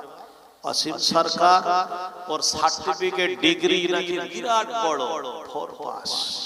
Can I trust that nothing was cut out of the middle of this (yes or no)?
yes